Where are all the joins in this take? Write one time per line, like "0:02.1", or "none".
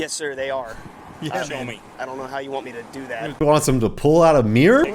0:01.8